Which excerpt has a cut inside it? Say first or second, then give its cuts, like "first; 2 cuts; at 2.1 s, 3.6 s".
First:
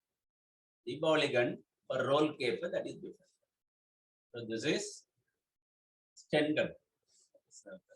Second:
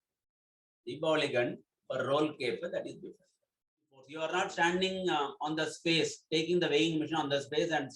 second; 1 cut; at 4.0 s